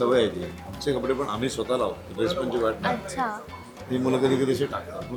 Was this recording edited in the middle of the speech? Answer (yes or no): no